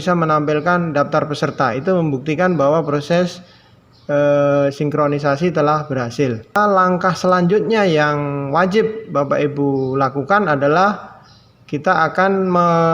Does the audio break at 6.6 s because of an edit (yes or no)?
yes